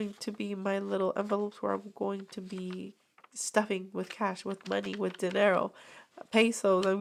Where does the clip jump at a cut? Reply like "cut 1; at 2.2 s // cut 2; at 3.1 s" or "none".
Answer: none